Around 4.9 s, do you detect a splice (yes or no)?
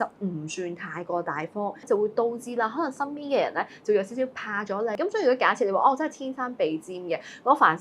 yes